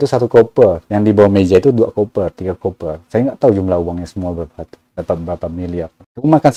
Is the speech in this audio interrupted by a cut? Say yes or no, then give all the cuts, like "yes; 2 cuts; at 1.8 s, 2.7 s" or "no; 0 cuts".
no; 0 cuts